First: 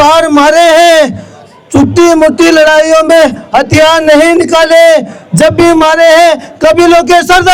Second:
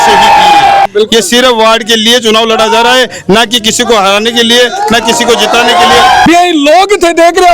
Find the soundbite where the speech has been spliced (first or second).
second